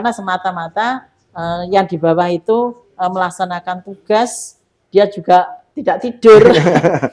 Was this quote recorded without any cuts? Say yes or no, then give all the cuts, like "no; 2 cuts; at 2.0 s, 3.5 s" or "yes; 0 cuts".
no; 1 cut; at 5.6 s